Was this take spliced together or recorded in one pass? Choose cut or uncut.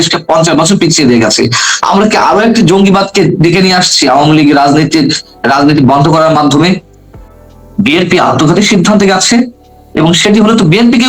cut